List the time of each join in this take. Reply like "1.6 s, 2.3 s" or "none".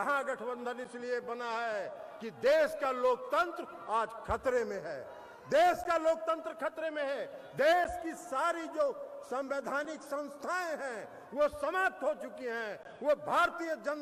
none